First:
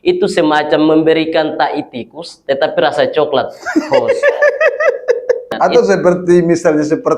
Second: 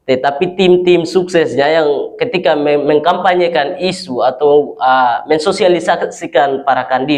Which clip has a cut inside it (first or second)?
first